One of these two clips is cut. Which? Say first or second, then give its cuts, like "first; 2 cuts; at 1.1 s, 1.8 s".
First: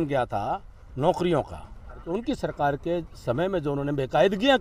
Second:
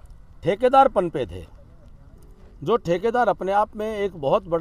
first; 1 cut; at 2.0 s